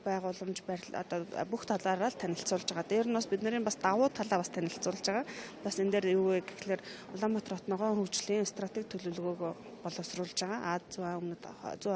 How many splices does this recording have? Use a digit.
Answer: 1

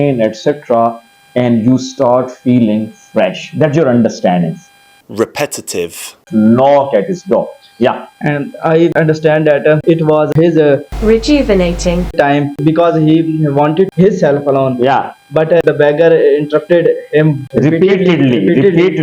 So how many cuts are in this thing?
1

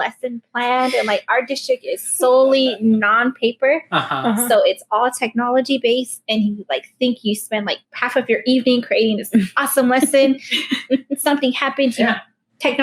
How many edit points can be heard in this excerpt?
1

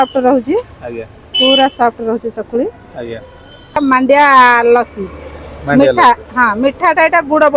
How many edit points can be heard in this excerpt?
1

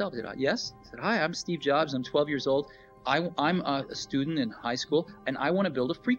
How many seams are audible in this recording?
1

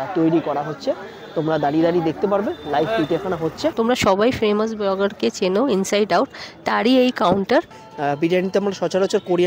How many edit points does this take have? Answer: 2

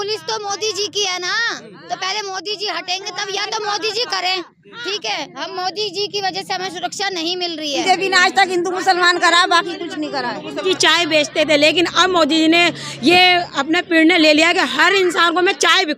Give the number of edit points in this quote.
2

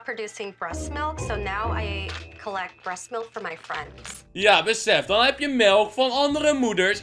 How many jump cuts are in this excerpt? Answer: 1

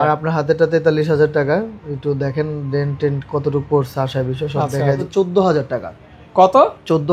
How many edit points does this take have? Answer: 1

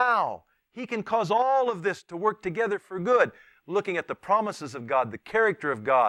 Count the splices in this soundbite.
0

